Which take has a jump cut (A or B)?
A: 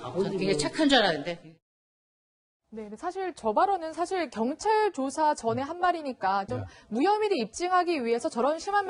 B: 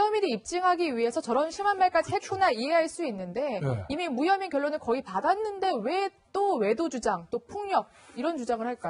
A